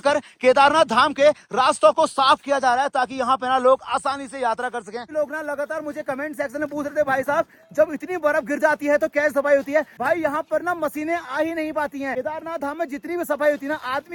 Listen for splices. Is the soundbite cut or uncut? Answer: uncut